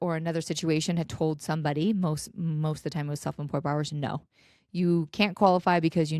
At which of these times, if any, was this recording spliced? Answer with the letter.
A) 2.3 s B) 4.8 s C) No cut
C